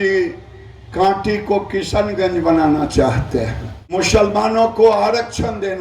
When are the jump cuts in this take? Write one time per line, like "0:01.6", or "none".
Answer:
0:04.0